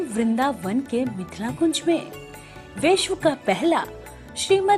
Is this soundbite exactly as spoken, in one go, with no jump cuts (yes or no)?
yes